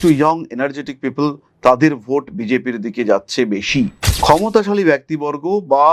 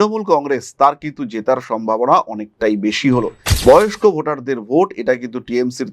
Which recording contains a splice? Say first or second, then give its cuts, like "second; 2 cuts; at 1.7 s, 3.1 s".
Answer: second; 1 cut; at 3.5 s